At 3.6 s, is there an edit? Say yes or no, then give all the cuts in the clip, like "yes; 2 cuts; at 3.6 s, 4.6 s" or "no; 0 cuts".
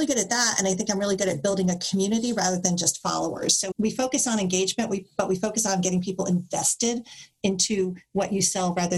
yes; 1 cut; at 3.6 s